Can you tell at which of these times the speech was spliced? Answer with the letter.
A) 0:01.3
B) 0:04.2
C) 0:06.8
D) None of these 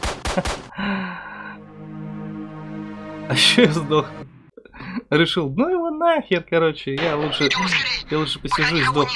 D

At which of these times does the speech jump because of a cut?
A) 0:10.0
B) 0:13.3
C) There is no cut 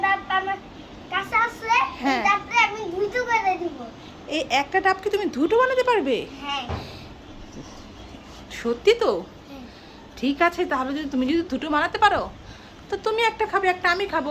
C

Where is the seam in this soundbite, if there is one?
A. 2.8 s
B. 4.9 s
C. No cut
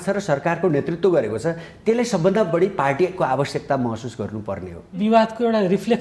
B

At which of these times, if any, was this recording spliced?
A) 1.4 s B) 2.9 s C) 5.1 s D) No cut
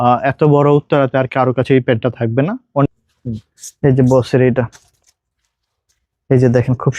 B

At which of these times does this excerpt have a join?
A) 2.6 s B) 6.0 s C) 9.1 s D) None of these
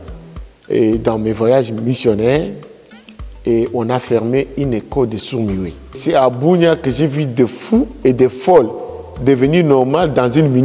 B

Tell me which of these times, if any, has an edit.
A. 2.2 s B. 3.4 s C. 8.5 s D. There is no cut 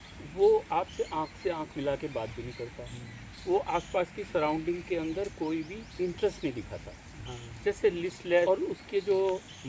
C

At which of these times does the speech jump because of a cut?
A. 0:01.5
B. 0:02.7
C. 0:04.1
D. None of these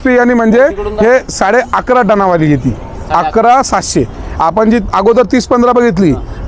D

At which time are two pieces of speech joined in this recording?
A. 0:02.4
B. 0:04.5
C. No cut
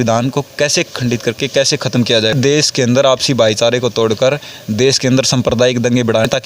A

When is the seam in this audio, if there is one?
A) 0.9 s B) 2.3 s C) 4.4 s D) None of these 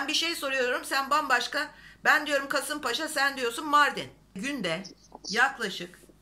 C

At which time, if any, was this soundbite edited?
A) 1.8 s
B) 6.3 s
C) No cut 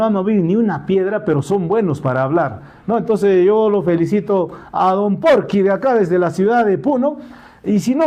C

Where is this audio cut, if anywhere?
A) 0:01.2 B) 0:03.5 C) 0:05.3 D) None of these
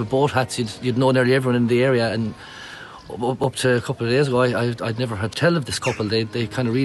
C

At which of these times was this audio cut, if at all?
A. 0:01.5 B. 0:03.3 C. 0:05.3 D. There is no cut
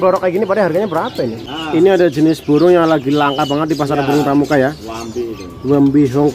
A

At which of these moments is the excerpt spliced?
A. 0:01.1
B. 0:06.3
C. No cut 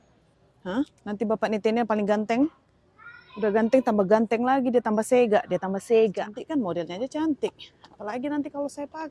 B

